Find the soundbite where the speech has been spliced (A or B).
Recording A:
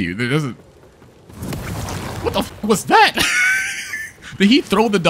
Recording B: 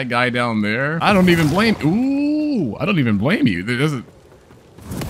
B